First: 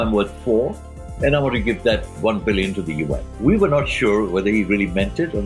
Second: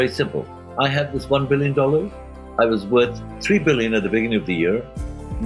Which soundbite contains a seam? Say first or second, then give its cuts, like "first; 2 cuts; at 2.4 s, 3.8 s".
first; 1 cut; at 3.2 s